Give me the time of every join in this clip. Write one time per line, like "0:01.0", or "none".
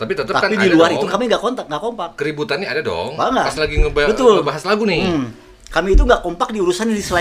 none